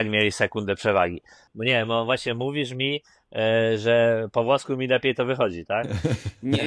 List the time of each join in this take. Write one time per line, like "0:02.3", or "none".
0:01.4